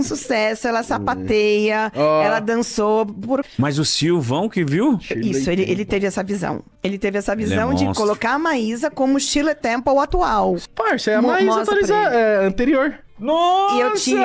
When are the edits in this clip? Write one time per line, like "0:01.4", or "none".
0:03.5
0:06.7
0:10.6